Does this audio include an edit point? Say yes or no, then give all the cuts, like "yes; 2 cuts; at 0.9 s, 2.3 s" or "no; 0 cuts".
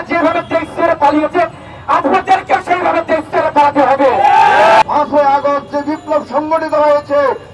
yes; 1 cut; at 4.8 s